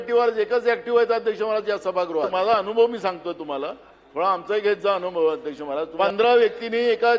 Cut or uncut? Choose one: cut